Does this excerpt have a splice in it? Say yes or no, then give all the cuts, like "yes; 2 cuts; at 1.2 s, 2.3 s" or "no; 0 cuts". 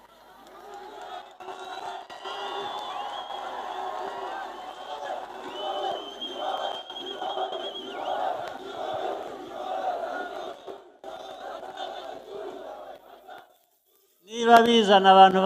no; 0 cuts